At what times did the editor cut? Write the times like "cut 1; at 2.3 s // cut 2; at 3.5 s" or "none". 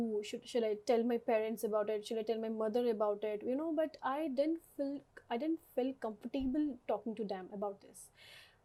none